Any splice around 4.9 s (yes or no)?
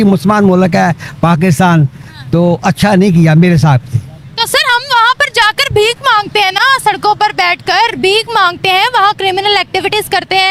no